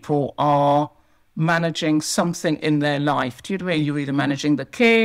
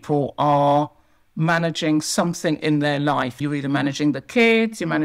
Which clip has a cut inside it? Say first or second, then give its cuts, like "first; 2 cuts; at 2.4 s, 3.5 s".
second; 1 cut; at 3.4 s